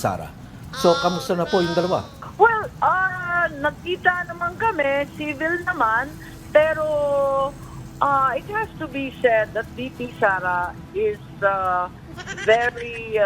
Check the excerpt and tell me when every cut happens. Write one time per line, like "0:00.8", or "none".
0:02.2